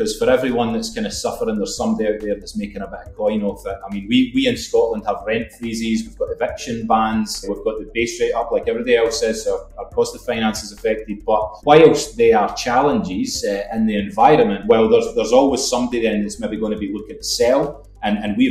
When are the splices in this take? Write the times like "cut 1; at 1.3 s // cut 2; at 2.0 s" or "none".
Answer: none